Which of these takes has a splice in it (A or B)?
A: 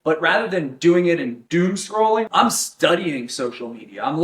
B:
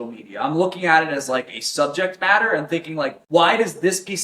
A